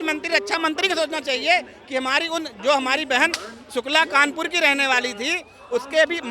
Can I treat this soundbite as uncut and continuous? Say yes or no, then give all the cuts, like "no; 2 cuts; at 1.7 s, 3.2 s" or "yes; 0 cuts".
yes; 0 cuts